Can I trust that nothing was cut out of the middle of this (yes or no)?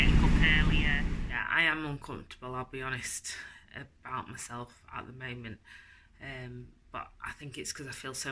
no